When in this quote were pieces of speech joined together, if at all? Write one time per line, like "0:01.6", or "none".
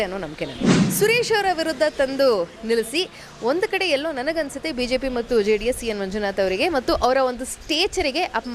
0:00.9

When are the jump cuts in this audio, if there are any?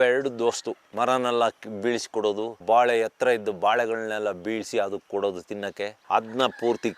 0:06.0

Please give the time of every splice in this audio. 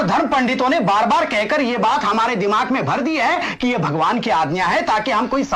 none

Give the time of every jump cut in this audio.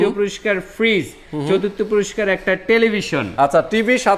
none

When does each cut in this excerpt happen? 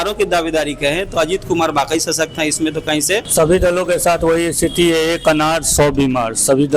0:03.3

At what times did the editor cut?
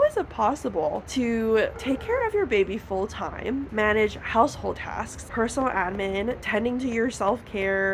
0:01.0
0:01.8
0:03.7
0:05.2
0:06.4

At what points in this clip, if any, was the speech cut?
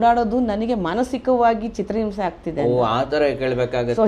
none

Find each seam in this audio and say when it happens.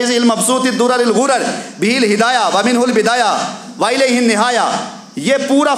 none

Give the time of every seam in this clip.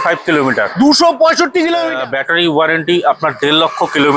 0:01.9

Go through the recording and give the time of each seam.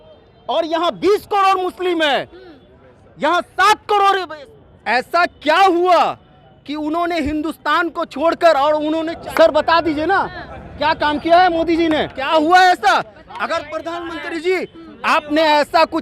0:04.4
0:09.1
0:12.2

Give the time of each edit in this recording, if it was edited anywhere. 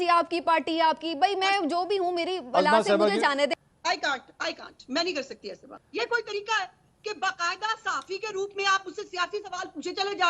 0:03.5
0:05.7

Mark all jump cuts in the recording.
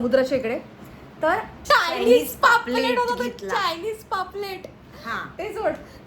0:01.5

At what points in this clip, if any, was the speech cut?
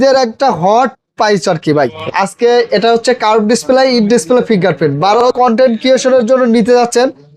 0:02.0
0:05.3

